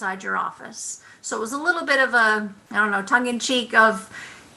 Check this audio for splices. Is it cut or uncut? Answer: uncut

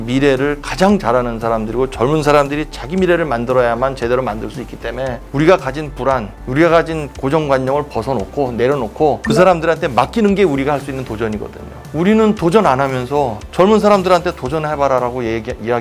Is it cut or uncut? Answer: uncut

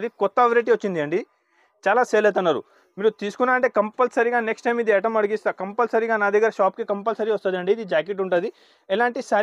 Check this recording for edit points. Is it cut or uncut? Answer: uncut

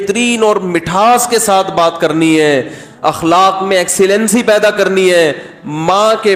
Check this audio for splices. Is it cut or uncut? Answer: uncut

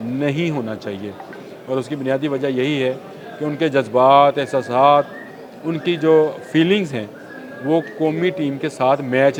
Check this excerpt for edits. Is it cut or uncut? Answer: uncut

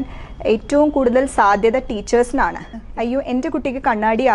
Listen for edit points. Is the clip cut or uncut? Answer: cut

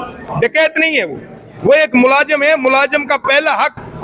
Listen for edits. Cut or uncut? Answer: uncut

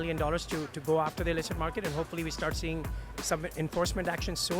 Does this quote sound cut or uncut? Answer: uncut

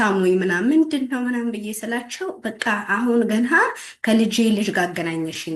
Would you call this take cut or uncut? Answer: uncut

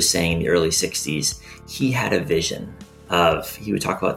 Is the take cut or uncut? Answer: uncut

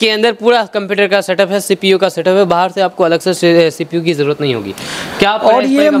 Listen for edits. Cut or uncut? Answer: uncut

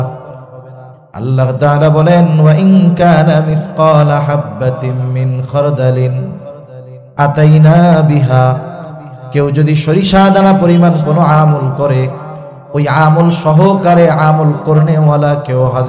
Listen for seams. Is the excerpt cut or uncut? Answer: uncut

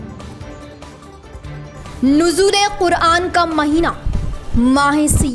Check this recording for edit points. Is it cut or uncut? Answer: cut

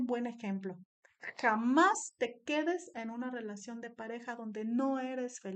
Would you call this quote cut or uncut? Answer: uncut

